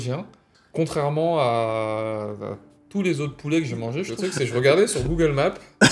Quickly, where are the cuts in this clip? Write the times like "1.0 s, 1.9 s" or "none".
4.1 s

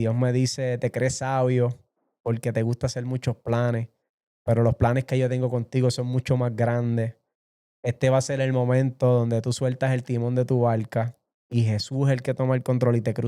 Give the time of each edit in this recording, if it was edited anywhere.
none

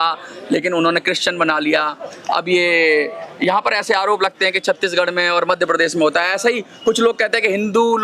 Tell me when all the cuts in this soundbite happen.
none

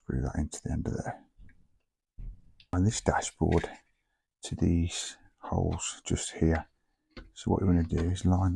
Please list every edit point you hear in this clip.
2.7 s

